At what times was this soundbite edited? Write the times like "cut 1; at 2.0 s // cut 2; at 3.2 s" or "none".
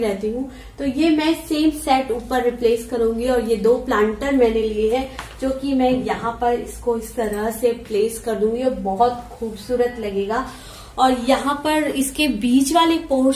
none